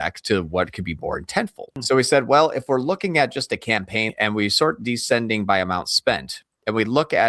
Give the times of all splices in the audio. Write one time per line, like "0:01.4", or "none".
0:01.8
0:04.1